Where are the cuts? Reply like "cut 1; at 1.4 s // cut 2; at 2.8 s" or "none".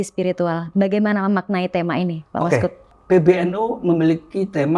cut 1; at 2.8 s